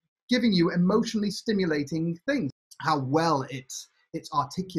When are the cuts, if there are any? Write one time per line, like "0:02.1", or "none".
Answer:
0:02.5